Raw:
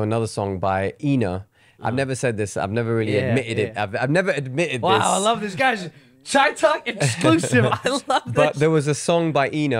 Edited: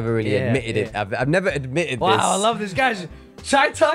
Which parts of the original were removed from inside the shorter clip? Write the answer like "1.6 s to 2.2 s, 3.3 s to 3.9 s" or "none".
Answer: none